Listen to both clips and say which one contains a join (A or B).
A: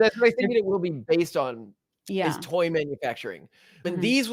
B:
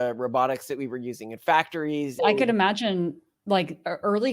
B